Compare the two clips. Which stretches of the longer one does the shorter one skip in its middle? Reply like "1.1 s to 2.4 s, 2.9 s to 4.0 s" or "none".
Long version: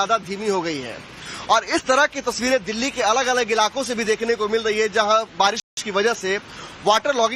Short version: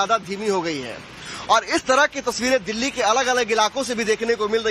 none